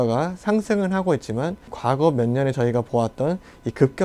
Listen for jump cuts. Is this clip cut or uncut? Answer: cut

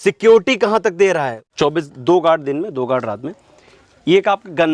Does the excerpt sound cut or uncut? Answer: cut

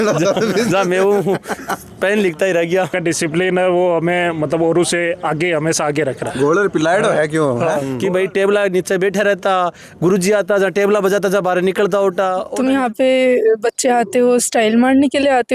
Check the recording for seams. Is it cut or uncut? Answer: cut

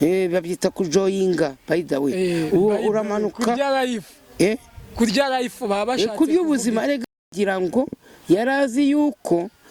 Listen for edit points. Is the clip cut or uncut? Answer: cut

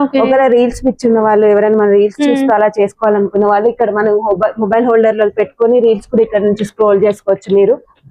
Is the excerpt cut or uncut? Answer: uncut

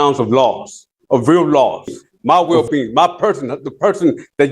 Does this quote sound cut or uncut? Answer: cut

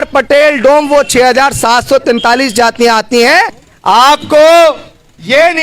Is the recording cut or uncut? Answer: cut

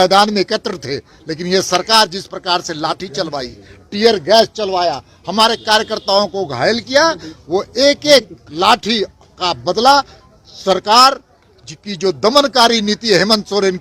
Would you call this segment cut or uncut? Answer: uncut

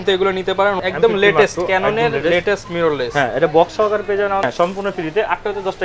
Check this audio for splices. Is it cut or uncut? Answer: cut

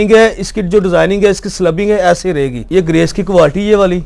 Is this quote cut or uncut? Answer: cut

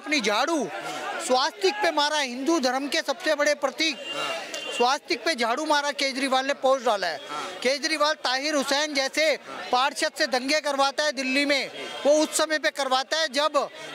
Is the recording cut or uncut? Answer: uncut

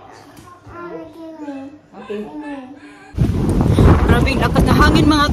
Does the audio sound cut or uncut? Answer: cut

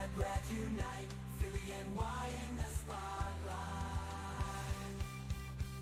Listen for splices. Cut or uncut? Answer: uncut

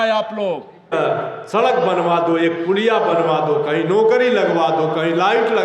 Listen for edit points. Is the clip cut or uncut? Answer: cut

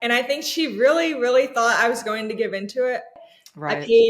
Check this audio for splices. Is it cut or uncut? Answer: cut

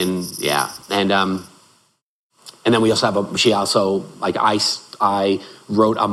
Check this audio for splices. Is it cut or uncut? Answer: uncut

